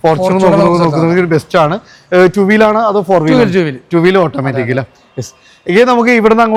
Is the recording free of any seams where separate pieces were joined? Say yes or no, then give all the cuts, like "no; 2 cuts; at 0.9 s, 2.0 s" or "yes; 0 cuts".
yes; 0 cuts